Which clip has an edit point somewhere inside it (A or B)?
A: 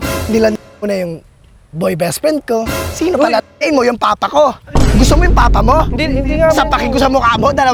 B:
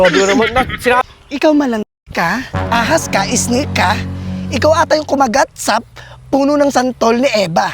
B